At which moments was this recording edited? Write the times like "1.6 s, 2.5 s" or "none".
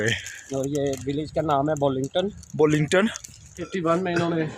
3.6 s